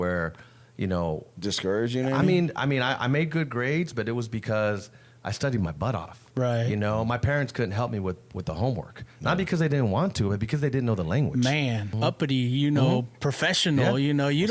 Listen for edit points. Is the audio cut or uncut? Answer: cut